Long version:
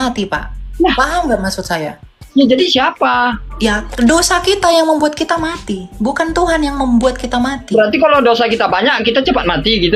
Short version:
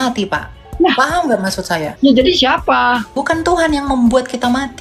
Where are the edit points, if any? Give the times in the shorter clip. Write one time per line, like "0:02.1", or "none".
0:01.9
0:03.1